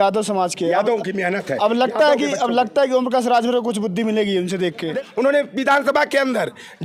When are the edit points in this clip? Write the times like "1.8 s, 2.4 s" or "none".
4.9 s